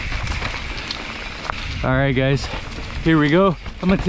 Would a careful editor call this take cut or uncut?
cut